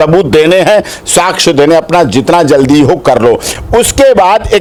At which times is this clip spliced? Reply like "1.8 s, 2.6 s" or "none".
none